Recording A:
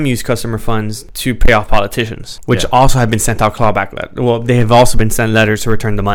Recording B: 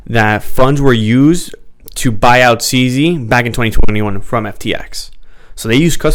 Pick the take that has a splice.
A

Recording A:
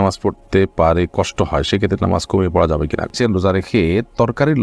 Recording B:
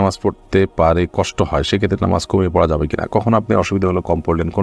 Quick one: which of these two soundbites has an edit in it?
A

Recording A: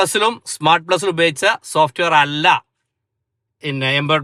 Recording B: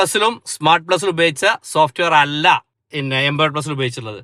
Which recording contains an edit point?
B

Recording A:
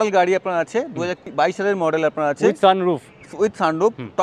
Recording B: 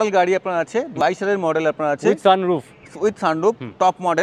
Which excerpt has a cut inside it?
B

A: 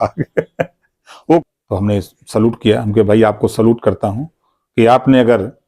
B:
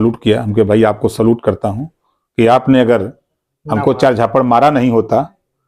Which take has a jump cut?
A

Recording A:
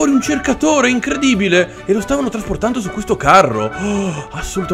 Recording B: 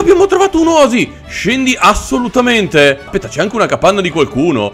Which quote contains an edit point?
B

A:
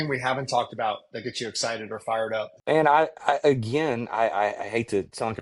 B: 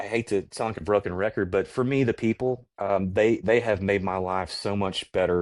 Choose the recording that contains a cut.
A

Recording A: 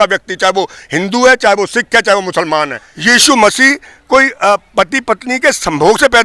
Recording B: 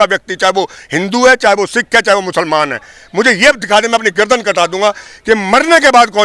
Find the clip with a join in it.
A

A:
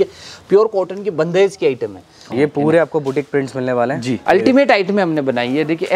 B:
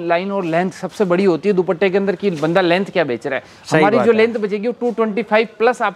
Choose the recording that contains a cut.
A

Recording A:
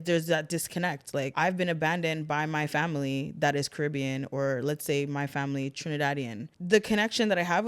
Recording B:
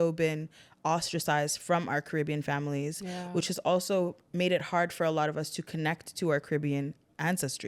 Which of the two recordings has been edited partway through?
A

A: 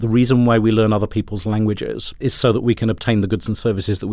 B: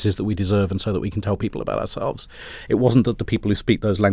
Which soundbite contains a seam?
A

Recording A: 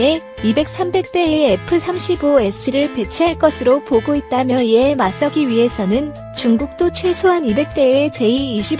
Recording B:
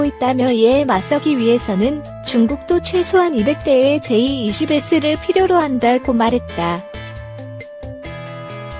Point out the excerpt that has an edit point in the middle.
B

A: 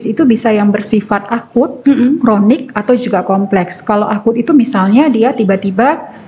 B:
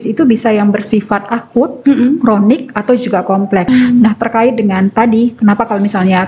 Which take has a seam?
B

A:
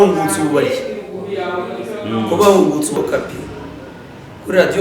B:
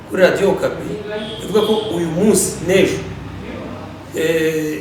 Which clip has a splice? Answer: A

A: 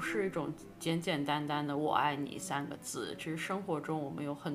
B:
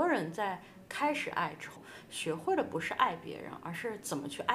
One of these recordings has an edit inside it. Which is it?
B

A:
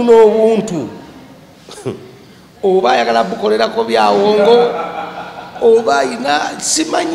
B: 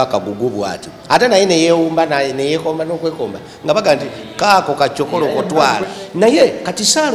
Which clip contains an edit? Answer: B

